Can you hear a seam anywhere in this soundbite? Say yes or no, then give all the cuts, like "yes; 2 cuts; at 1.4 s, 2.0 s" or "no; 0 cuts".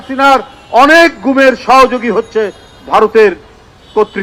no; 0 cuts